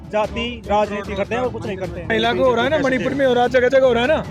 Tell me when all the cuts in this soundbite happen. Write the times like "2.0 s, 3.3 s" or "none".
2.1 s